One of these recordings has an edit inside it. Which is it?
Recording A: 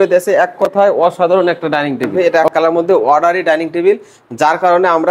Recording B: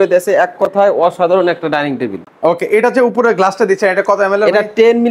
A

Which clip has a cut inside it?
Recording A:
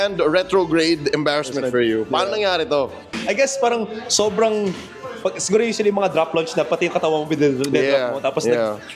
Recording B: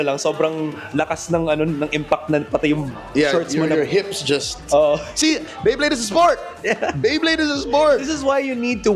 A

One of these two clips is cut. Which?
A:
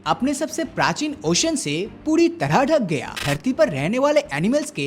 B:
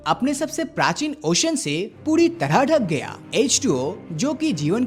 A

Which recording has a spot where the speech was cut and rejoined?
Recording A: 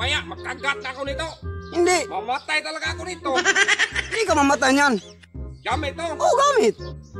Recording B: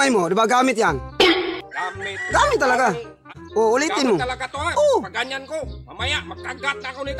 B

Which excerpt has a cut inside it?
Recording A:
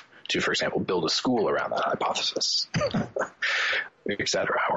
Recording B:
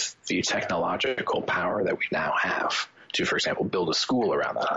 A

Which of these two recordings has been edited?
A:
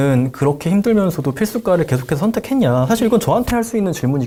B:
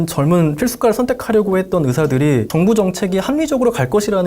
B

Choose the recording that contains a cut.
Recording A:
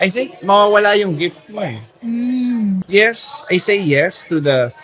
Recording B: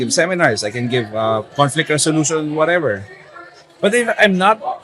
A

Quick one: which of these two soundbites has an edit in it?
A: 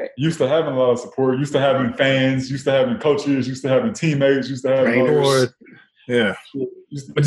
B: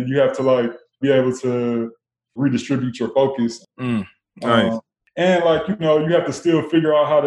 B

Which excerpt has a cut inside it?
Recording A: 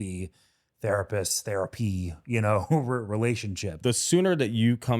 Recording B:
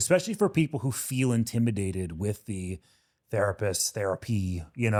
A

